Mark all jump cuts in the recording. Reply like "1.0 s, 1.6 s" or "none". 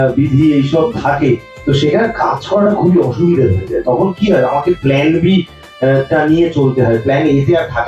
none